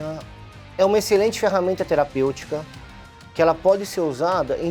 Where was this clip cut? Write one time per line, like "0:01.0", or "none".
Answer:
none